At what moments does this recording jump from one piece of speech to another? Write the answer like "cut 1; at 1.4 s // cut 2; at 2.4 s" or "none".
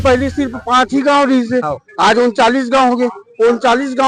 none